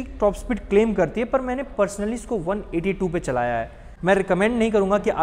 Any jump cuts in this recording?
no; 0 cuts

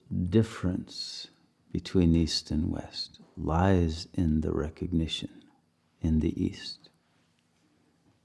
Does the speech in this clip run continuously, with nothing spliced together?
yes; 0 cuts

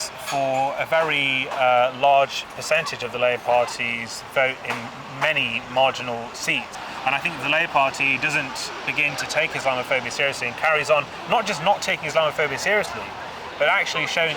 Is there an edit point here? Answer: yes; 1 cut; at 6.7 s

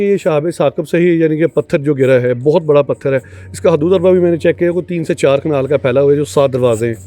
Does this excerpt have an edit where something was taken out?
no; 0 cuts

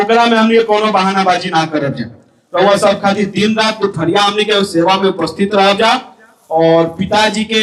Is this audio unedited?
yes; 0 cuts

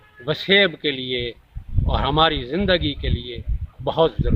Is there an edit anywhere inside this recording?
no; 0 cuts

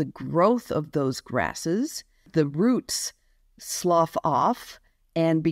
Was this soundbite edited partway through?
yes; 1 cut; at 2.1 s

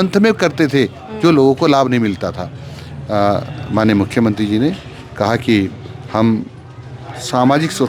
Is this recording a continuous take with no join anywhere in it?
yes; 0 cuts

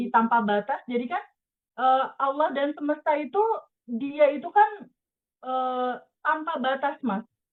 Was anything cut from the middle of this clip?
no; 0 cuts

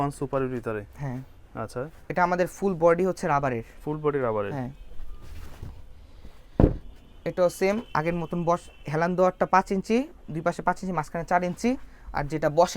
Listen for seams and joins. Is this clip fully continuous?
yes; 0 cuts

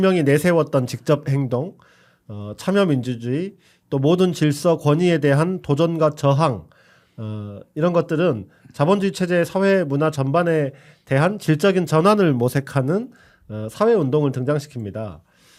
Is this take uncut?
yes; 0 cuts

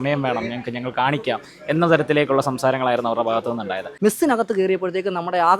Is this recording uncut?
no; 1 cut; at 3.9 s

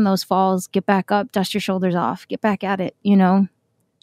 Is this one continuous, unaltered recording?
yes; 0 cuts

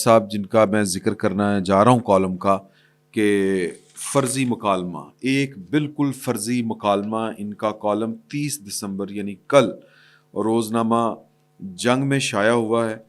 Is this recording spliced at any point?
no; 0 cuts

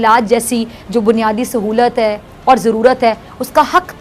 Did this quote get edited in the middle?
no; 0 cuts

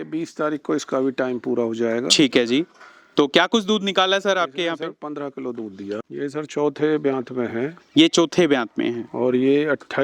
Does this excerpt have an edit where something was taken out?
yes; 1 cut; at 6.1 s

